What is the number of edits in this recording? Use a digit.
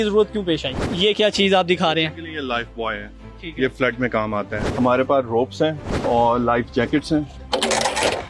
4